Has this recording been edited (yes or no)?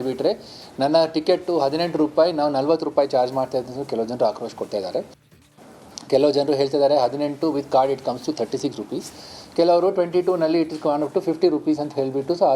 no